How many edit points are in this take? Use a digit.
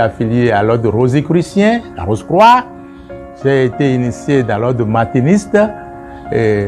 0